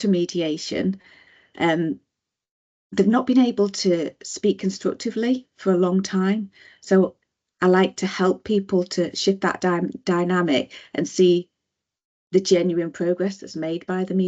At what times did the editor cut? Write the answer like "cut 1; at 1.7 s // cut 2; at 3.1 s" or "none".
none